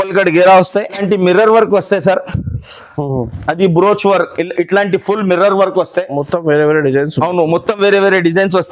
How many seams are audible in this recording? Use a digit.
1